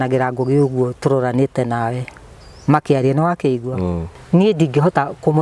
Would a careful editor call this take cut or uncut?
cut